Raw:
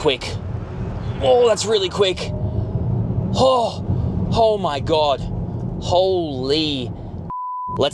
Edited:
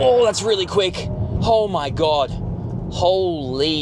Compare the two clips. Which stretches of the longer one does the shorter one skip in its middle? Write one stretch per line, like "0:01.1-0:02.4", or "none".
0:02.5-0:04.2